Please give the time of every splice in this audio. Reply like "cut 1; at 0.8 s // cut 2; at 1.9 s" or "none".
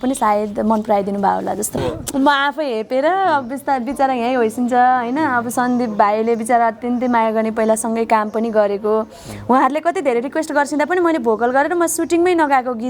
cut 1; at 1.8 s

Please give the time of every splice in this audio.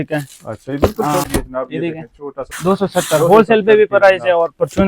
cut 1; at 1.2 s // cut 2; at 2.5 s

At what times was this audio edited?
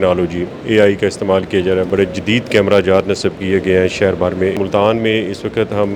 cut 1; at 1.9 s // cut 2; at 4.6 s

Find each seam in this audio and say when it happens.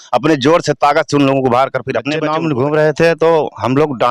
cut 1; at 2.2 s

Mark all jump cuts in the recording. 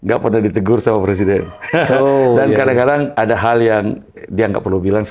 cut 1; at 3.1 s

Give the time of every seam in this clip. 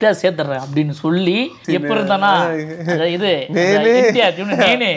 cut 1; at 1.6 s

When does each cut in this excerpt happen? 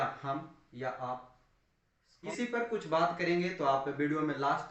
cut 1; at 2.3 s

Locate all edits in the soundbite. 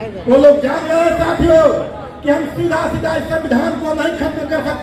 none

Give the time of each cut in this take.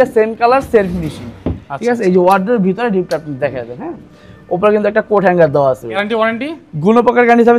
cut 1; at 5.9 s

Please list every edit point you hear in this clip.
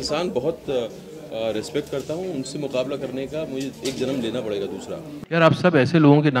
cut 1; at 5.1 s

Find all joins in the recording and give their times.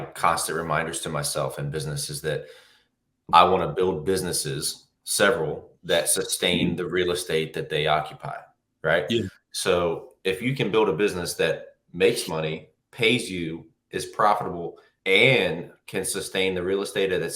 none

